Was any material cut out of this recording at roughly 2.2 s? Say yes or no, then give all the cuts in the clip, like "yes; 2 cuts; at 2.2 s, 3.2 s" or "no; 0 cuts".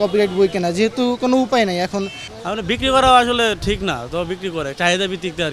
yes; 1 cut; at 2.2 s